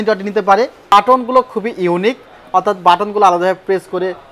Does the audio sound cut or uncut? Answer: cut